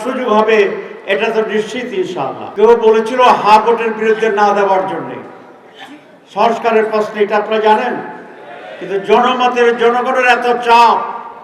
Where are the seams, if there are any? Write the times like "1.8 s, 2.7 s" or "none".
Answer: 2.4 s